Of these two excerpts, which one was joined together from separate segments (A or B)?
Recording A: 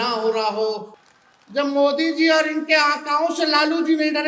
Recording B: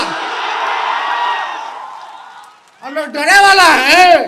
A